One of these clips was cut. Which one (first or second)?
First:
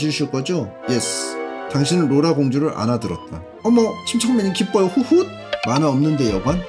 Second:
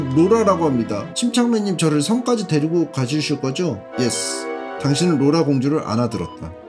second